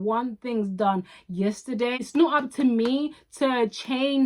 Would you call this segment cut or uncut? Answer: cut